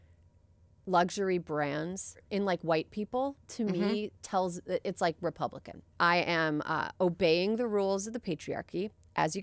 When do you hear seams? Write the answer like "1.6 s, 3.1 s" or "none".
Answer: 2.2 s, 5.9 s